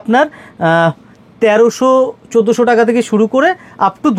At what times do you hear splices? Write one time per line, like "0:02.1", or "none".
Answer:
none